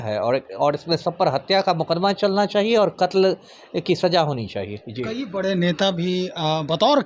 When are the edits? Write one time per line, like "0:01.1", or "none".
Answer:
none